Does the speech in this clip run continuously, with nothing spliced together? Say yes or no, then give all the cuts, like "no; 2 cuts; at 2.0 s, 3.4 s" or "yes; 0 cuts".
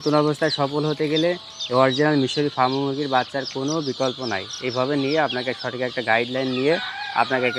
yes; 0 cuts